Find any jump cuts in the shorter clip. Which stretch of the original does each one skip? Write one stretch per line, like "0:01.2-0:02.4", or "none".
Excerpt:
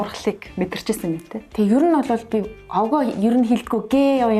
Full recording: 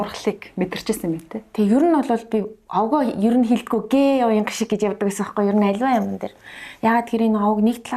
none